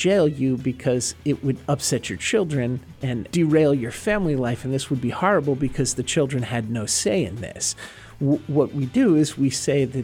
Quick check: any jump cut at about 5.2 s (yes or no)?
no